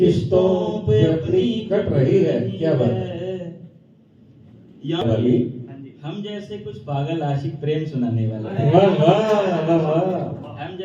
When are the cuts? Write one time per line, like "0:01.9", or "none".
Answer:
0:05.0